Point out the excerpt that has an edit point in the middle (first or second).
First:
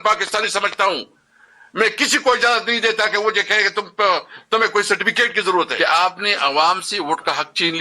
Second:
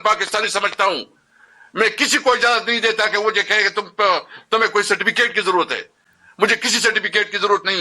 first